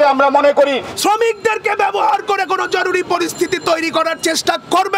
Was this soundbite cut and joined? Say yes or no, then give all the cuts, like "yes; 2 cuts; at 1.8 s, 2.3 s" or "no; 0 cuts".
yes; 1 cut; at 0.9 s